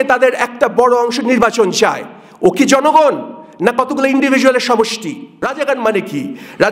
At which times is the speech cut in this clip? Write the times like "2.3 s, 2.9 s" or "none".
5.4 s